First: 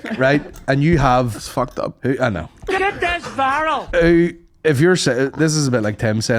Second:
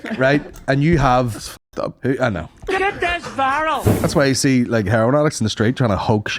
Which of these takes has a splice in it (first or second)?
second